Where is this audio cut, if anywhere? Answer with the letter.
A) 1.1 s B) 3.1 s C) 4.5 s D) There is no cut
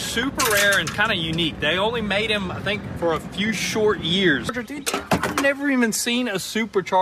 C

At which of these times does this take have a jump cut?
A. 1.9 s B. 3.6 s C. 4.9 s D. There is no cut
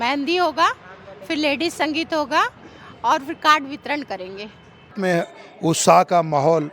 C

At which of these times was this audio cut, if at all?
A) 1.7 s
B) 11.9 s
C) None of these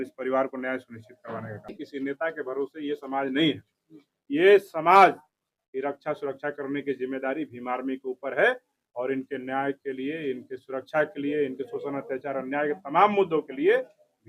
A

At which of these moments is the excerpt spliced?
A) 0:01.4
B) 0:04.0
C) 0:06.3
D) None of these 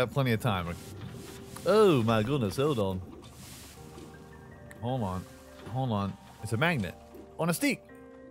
C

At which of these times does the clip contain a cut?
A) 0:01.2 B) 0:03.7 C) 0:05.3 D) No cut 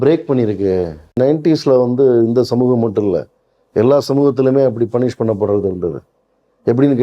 A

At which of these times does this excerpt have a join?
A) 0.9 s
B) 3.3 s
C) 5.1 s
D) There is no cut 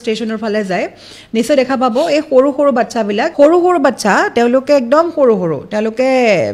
B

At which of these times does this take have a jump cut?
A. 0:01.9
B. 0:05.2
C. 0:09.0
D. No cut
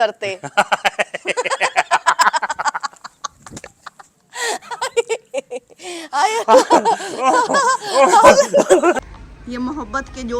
C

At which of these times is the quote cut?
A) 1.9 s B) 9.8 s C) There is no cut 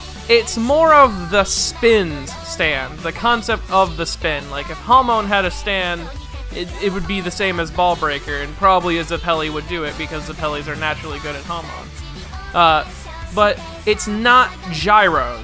C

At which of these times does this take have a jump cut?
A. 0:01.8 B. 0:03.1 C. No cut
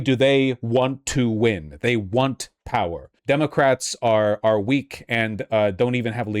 B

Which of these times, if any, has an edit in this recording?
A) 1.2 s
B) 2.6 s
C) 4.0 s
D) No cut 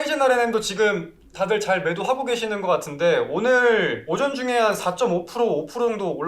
C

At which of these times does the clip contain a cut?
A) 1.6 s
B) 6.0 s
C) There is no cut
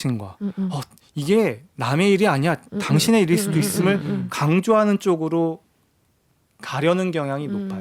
C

